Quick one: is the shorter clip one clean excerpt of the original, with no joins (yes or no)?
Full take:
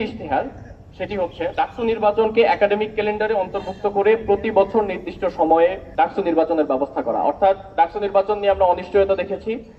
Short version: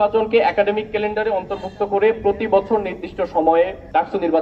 yes